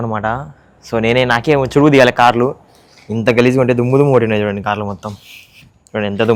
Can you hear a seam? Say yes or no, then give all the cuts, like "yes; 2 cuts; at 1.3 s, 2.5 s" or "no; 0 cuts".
no; 0 cuts